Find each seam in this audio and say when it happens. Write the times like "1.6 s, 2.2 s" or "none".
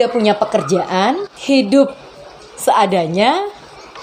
none